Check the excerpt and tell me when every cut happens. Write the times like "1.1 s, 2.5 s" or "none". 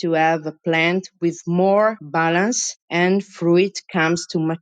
2.2 s